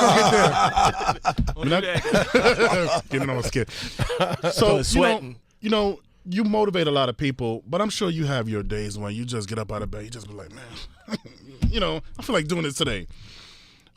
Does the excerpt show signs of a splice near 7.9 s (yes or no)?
yes